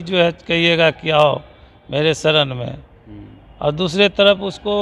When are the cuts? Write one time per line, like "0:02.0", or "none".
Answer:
none